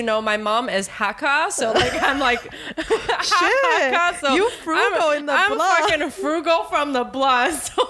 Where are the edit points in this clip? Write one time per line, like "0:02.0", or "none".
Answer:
none